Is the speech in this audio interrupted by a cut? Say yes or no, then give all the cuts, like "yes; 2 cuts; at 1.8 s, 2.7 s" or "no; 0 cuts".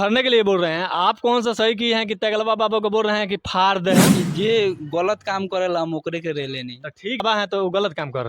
yes; 2 cuts; at 4.1 s, 7.2 s